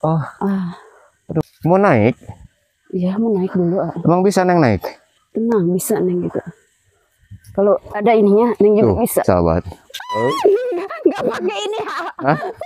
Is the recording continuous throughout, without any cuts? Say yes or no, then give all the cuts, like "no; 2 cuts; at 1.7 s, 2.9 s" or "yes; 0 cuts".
no; 1 cut; at 1.5 s